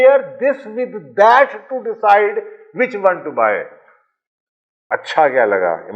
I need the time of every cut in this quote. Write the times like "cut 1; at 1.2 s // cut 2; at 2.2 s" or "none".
cut 1; at 4.8 s